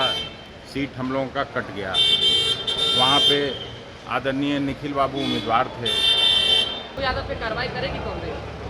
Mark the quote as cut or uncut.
cut